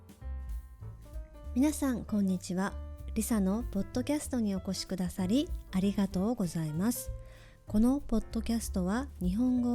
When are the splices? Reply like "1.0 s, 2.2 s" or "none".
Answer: 1.5 s